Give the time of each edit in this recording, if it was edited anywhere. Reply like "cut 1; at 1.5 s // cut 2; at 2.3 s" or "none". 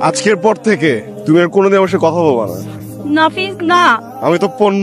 cut 1; at 1.1 s